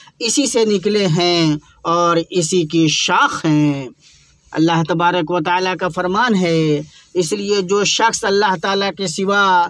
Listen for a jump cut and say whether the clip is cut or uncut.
uncut